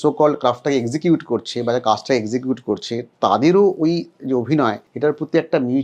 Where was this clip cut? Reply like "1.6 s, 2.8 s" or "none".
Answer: 4.9 s